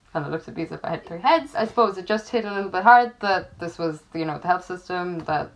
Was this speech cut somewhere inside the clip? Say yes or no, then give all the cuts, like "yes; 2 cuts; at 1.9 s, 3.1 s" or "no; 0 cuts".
yes; 1 cut; at 1.5 s